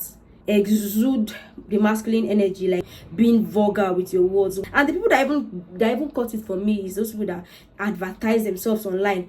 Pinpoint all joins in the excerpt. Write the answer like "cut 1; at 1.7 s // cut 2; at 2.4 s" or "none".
cut 1; at 3.0 s // cut 2; at 4.6 s